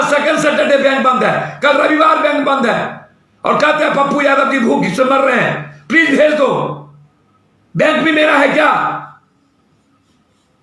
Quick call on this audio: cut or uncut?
uncut